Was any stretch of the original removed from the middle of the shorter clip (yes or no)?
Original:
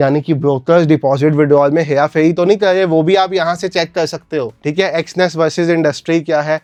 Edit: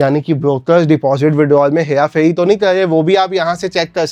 no